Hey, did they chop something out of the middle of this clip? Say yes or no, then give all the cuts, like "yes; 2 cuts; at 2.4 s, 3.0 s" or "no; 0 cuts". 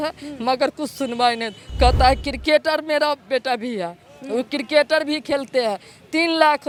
no; 0 cuts